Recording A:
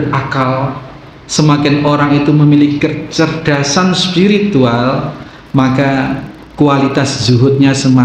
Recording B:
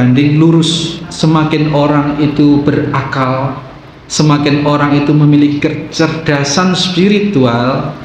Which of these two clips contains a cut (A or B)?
B